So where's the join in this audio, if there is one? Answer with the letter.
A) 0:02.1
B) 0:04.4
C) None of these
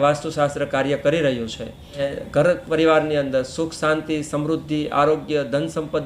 A